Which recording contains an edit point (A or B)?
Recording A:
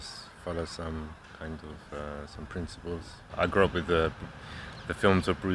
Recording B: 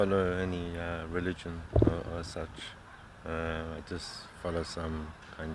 A